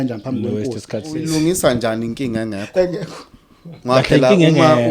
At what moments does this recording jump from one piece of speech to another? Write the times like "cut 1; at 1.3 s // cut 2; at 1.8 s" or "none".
cut 1; at 1.1 s